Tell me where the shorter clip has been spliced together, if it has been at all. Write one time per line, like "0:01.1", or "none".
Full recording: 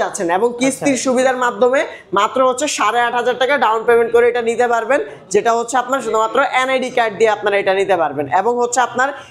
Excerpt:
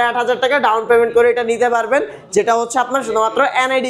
none